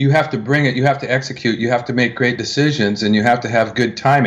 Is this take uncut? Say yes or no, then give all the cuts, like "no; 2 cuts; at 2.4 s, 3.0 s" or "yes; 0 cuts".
yes; 0 cuts